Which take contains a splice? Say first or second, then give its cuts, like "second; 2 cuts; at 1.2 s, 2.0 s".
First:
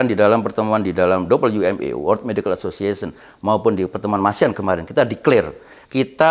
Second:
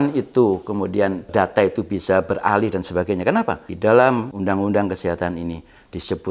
second; 3 cuts; at 1.3 s, 3.6 s, 4.3 s